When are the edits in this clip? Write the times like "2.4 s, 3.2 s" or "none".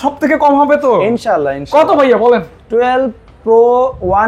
none